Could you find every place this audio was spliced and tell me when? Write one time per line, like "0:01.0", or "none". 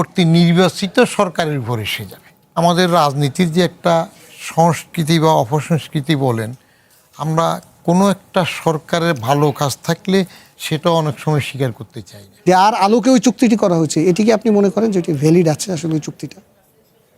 0:02.6
0:12.4